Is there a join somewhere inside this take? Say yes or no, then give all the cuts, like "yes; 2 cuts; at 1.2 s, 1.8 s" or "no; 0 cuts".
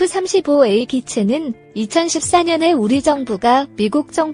no; 0 cuts